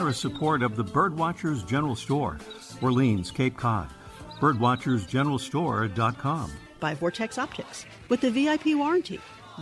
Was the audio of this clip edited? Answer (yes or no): yes